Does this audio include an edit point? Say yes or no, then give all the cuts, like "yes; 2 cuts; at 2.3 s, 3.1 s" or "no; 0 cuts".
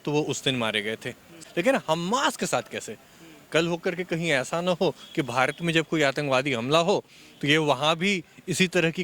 yes; 1 cut; at 1.3 s